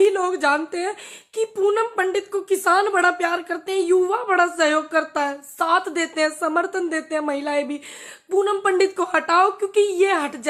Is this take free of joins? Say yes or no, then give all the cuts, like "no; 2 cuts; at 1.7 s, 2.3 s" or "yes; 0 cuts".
yes; 0 cuts